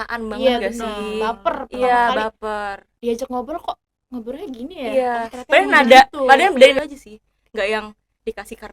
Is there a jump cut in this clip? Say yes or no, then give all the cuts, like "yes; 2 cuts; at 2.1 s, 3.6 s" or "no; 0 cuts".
yes; 1 cut; at 6.8 s